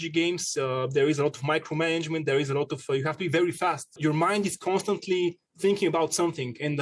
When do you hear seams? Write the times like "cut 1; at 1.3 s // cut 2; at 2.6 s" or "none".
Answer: cut 1; at 4.0 s